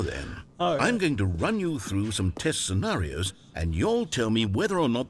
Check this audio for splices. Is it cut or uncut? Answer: uncut